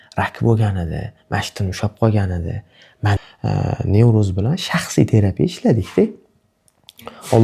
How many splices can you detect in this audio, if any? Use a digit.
1